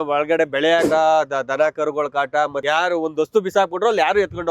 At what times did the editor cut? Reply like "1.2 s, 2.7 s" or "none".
0.9 s, 2.6 s